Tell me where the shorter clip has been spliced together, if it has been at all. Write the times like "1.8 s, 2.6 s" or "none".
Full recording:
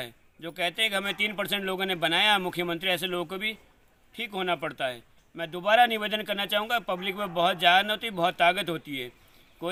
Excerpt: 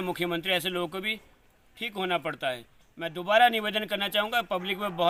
none